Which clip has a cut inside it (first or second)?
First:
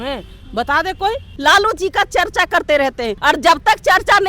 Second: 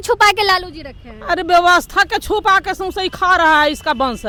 first